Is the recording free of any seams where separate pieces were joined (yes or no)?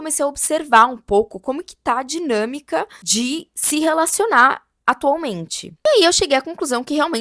no